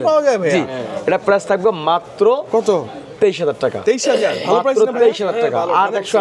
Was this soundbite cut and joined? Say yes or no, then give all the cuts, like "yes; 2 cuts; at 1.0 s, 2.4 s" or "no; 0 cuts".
no; 0 cuts